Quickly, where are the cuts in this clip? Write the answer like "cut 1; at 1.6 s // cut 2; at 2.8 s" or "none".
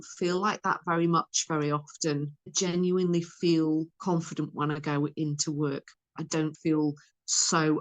cut 1; at 6.1 s